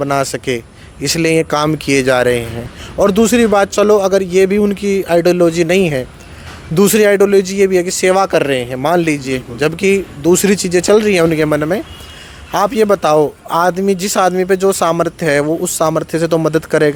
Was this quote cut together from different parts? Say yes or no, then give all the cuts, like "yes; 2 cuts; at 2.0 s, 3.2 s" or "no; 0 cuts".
no; 0 cuts